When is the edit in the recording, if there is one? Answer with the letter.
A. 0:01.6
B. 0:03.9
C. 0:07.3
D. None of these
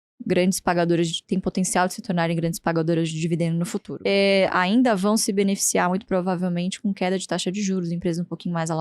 B